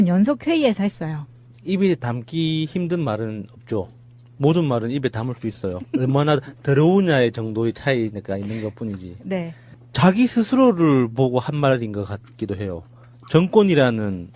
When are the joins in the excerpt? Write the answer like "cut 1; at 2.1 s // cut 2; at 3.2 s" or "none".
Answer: cut 1; at 9.3 s